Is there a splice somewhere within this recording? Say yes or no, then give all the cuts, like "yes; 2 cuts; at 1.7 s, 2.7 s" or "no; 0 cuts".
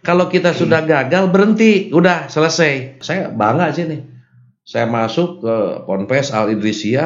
yes; 1 cut; at 3.0 s